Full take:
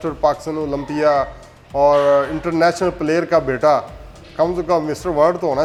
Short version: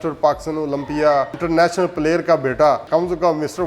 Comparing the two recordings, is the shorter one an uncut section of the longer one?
no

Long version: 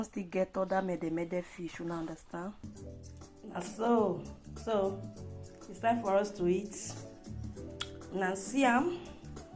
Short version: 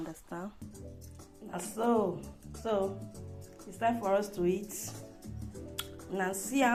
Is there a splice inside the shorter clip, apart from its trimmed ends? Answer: no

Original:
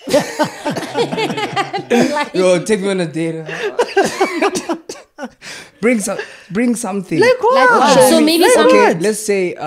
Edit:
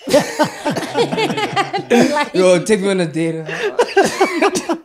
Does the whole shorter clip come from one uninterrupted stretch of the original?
yes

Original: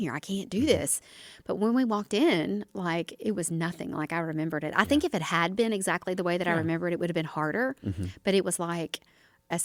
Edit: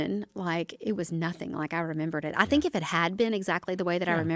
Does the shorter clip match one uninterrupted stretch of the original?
yes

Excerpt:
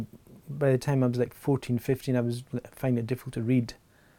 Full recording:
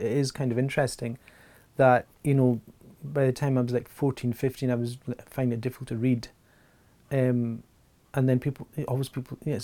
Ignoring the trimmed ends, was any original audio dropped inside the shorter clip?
no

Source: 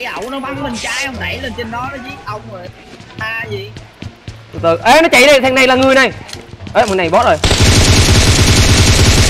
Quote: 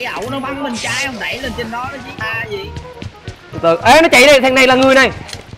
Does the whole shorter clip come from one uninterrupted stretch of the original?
no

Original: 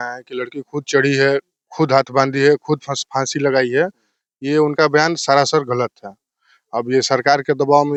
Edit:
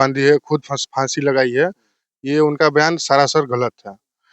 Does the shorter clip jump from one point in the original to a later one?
no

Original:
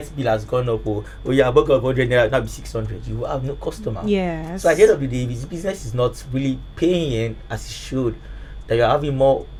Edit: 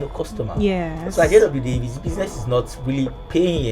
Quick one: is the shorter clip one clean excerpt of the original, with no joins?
yes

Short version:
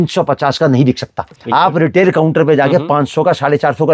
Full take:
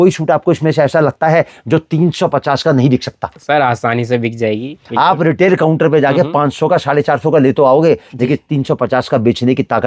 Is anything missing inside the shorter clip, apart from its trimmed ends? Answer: yes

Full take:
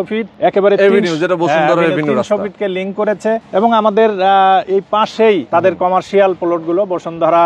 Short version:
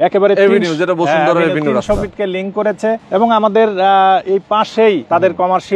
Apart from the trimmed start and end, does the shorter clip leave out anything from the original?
no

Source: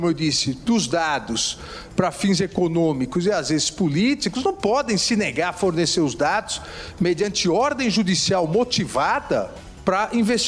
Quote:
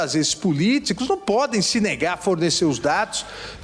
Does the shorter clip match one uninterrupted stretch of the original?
yes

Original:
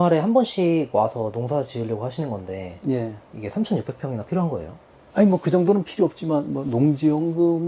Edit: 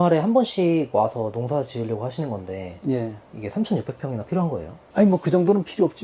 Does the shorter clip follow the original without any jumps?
no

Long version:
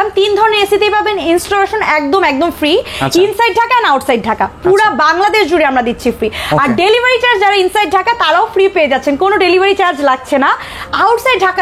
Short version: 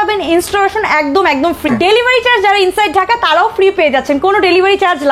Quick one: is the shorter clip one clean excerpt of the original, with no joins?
no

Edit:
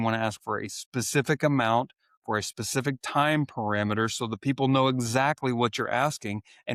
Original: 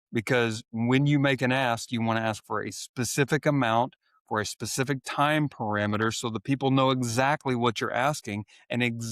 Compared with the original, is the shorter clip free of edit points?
yes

